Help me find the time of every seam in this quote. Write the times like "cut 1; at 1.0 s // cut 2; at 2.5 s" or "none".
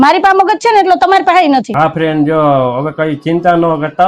cut 1; at 1.7 s